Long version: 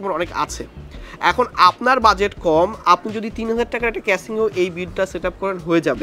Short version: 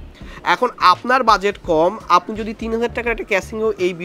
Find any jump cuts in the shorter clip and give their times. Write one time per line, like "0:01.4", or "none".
none